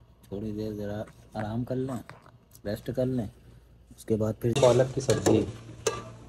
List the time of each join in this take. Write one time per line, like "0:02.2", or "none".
0:04.6